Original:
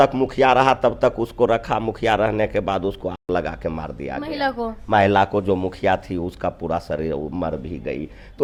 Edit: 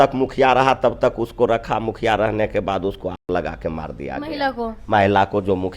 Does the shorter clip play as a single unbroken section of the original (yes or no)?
yes